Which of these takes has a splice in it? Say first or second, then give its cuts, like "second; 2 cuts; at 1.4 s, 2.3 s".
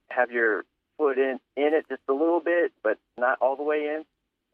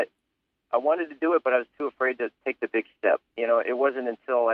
second; 1 cut; at 3.3 s